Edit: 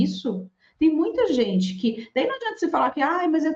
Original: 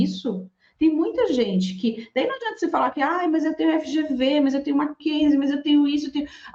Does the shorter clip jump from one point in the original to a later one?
no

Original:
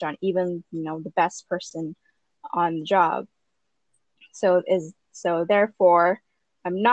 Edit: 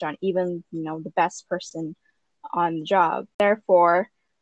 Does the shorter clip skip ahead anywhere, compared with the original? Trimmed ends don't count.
yes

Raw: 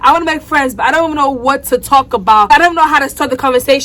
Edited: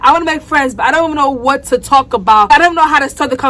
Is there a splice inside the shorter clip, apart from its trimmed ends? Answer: no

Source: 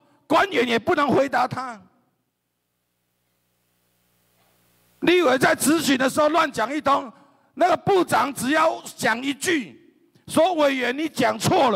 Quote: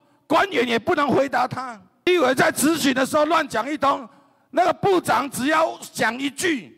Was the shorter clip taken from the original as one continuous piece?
no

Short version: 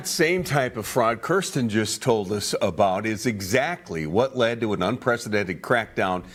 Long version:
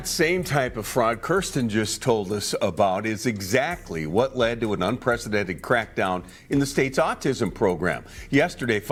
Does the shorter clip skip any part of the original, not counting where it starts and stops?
no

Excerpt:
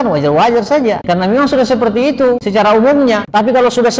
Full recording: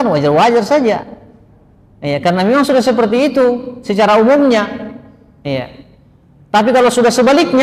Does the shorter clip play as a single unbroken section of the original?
no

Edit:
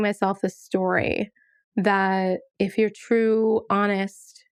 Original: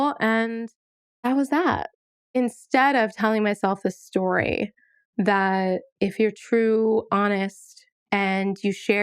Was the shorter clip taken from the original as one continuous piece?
yes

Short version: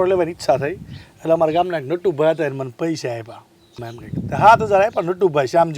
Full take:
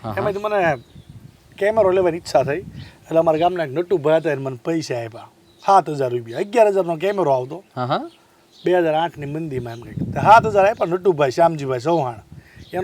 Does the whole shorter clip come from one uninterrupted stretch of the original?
no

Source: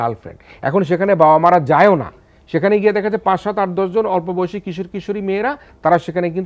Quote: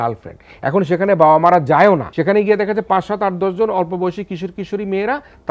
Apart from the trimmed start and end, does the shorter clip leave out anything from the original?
yes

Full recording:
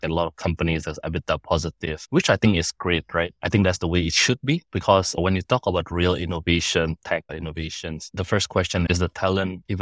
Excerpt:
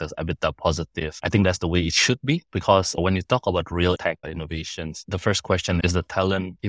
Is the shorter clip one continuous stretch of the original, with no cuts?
no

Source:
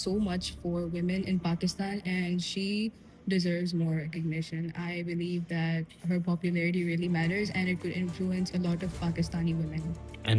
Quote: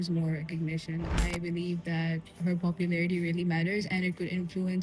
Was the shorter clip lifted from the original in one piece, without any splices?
yes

